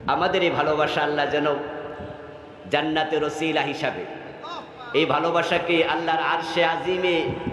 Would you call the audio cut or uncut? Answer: uncut